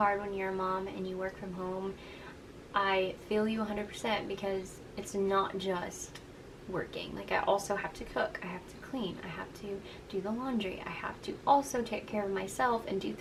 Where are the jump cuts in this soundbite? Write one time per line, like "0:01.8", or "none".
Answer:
none